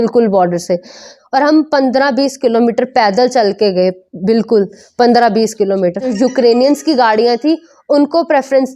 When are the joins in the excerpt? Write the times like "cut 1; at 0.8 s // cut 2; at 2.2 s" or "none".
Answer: cut 1; at 1.1 s // cut 2; at 6.1 s

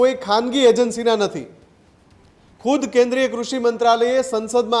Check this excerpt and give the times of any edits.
none

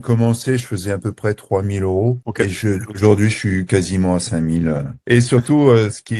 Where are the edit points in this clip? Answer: none

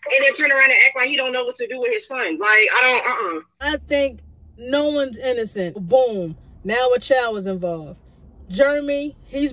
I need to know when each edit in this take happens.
cut 1; at 3.5 s // cut 2; at 5.8 s

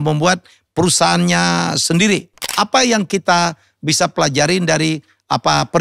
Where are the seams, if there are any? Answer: cut 1; at 2.4 s

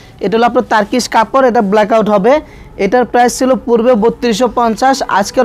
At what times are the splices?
none

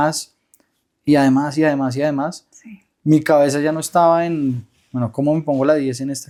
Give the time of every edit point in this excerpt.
none

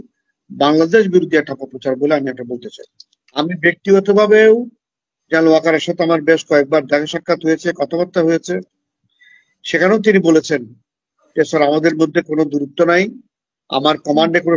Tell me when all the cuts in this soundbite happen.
cut 1; at 3.2 s

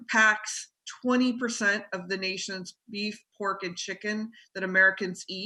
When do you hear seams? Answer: none

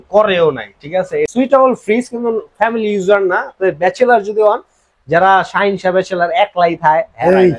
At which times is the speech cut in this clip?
cut 1; at 1.3 s

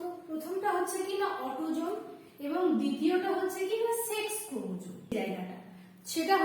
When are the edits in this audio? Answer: cut 1; at 5.1 s

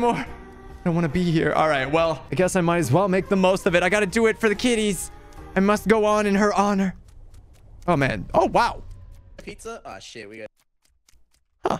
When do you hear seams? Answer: none

